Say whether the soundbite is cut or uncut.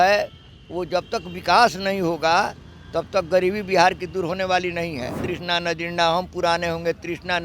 cut